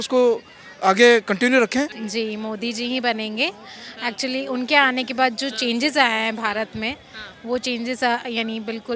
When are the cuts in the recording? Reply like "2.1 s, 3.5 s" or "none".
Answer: 2.0 s